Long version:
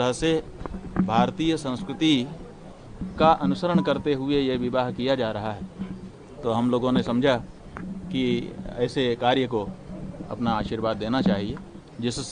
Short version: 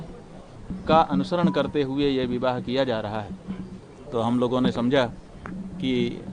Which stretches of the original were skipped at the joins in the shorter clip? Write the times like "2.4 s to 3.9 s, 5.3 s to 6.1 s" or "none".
none